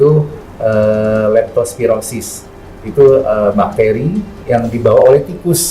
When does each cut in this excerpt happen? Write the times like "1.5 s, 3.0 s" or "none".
none